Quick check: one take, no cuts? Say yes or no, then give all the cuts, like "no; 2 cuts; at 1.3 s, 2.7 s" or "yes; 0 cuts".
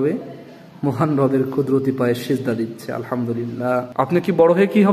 no; 1 cut; at 3.9 s